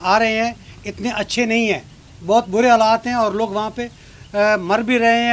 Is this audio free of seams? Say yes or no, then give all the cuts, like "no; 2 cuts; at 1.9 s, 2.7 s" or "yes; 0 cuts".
yes; 0 cuts